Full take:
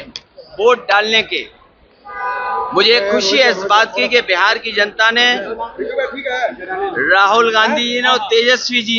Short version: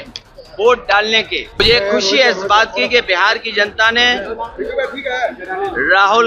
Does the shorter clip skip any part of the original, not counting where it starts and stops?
yes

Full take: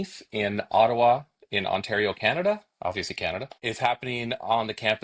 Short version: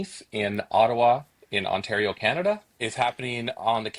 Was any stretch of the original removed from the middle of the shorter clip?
yes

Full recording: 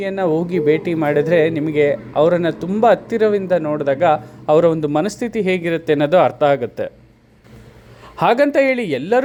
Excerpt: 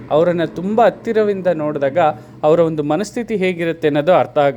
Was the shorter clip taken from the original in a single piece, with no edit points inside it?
yes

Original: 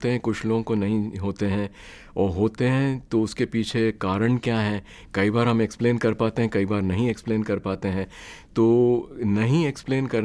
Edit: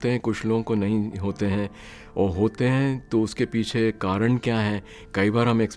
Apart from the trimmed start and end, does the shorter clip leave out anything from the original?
no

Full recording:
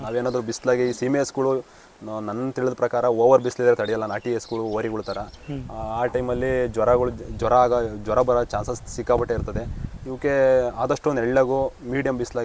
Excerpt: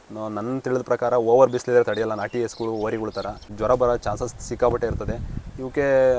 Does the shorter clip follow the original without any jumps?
no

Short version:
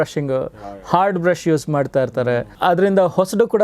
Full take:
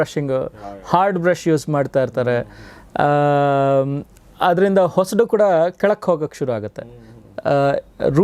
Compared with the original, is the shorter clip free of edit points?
no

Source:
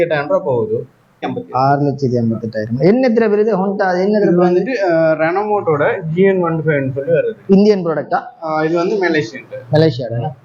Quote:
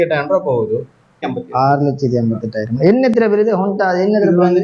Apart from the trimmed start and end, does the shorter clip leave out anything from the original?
no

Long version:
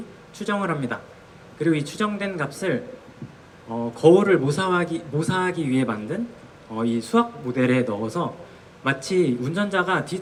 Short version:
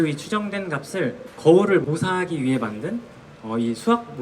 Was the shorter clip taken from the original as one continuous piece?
no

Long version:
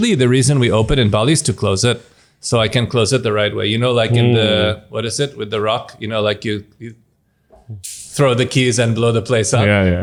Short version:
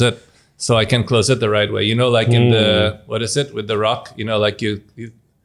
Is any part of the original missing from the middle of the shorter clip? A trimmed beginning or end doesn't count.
no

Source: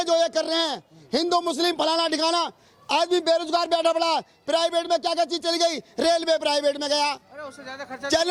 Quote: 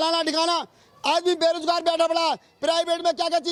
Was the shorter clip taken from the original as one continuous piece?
yes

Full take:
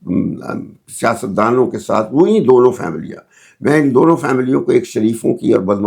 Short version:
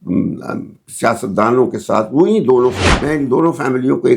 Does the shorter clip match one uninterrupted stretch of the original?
no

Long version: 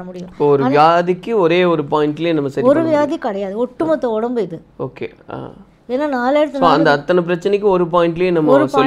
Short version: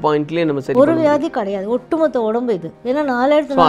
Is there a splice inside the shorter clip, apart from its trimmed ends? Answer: yes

